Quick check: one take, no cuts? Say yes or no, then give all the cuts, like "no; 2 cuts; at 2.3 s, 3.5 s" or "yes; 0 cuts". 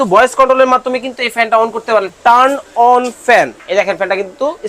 no; 2 cuts; at 2.1 s, 3.6 s